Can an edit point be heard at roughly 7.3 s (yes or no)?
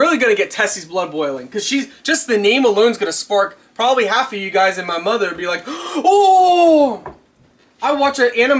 no